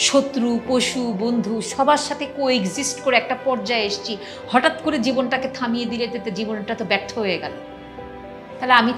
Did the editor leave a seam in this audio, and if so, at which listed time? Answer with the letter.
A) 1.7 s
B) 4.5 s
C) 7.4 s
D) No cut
D